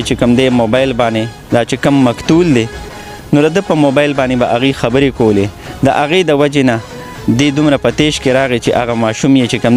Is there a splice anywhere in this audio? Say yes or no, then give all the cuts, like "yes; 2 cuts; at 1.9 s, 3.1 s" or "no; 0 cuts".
no; 0 cuts